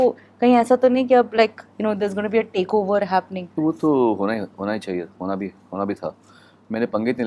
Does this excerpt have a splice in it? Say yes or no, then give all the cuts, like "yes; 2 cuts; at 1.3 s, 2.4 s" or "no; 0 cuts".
no; 0 cuts